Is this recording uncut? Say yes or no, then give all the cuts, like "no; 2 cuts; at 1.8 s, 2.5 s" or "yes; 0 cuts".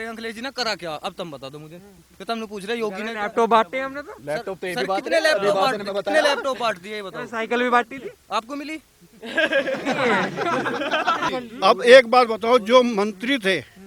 no; 1 cut; at 11.3 s